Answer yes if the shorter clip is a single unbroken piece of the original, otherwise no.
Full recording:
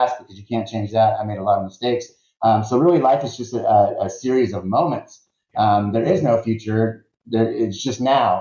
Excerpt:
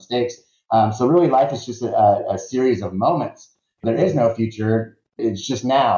no